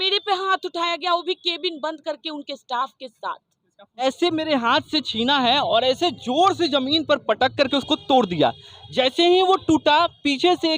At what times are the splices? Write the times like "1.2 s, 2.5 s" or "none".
4.0 s